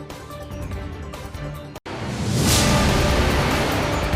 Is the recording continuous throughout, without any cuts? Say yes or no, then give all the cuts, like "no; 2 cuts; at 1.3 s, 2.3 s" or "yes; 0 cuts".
no; 1 cut; at 1.2 s